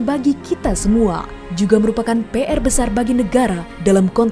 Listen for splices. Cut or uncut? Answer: uncut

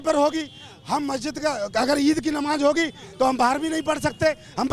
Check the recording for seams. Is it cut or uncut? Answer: uncut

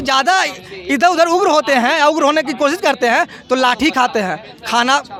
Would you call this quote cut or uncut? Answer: uncut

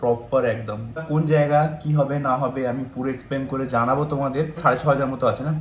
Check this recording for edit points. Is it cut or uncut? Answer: cut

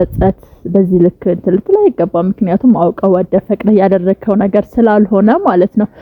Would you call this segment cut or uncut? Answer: uncut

